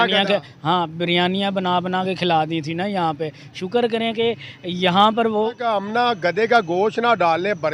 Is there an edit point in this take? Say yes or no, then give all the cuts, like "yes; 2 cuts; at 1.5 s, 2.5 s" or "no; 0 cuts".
yes; 1 cut; at 5.7 s